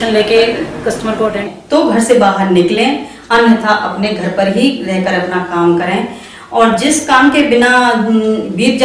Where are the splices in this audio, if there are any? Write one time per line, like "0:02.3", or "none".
0:01.5